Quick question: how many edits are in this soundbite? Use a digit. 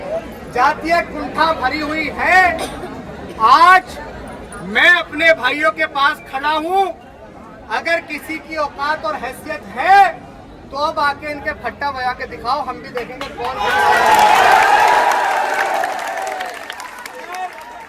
0